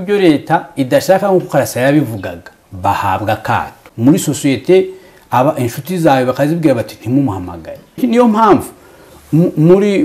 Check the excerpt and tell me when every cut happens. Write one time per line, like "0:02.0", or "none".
0:03.8
0:08.0